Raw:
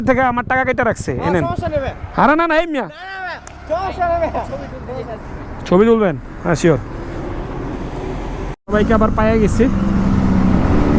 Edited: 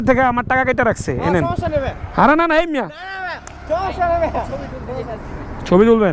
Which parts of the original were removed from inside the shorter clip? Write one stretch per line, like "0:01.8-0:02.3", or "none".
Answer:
none